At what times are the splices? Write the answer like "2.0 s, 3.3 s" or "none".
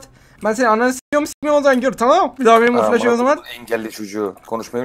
2.3 s